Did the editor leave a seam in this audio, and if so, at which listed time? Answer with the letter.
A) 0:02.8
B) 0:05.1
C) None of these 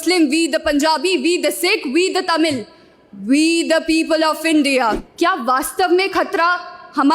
B